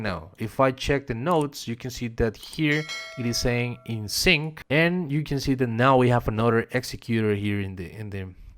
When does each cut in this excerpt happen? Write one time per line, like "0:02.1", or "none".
0:04.5